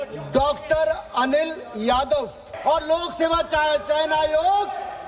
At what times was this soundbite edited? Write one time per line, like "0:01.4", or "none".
0:02.4